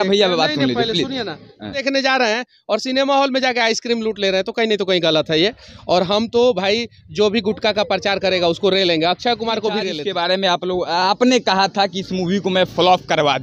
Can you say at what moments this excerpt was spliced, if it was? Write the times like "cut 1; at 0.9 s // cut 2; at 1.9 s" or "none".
cut 1; at 1.8 s // cut 2; at 9.9 s